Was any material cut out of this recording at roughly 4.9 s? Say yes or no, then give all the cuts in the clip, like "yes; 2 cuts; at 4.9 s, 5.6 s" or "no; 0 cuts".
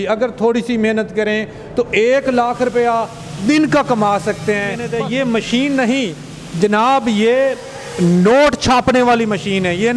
yes; 1 cut; at 4.9 s